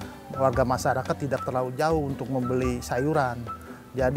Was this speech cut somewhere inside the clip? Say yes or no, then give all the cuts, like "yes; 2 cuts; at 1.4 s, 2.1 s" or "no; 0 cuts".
no; 0 cuts